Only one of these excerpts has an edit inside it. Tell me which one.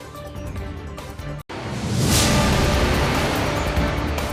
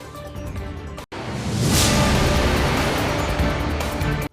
second; 1 cut; at 1.0 s

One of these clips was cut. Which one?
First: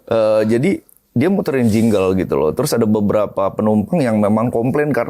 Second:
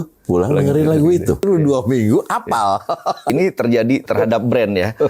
second; 2 cuts; at 1.4 s, 3.3 s

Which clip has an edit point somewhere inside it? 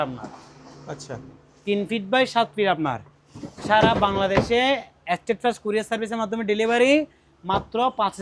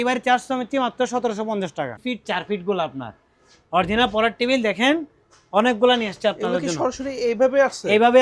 second; 1 cut; at 2.0 s

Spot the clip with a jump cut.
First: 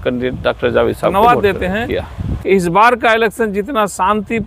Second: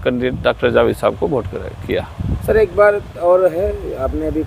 first; 1 cut; at 1.1 s

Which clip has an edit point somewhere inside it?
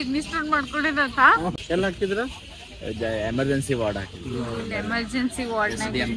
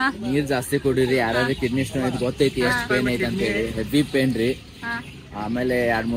first; 1 cut; at 1.5 s

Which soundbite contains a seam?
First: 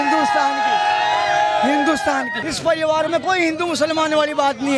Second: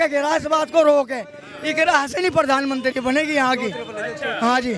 first; 1 cut; at 2.4 s

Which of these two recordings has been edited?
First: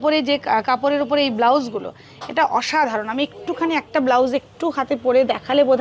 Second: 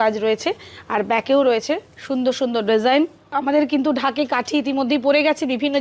second; 1 cut; at 3.3 s

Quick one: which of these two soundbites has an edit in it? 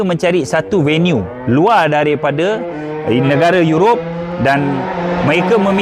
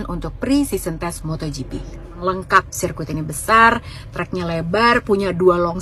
second; 1 cut; at 2.2 s

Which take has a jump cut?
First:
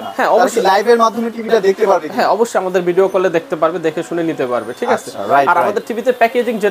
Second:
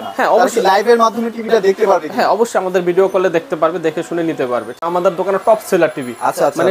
second; 1 cut; at 4.7 s

